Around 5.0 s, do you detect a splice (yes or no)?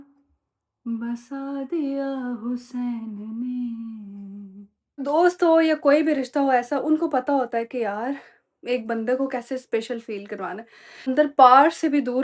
yes